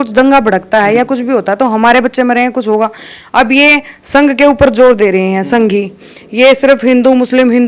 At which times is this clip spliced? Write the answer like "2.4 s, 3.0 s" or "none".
none